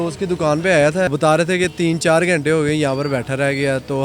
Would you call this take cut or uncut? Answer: cut